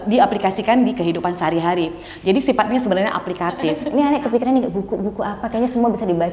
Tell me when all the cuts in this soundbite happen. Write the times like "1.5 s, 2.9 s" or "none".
3.8 s